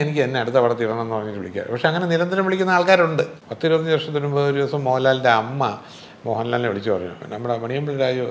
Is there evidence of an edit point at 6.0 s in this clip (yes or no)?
no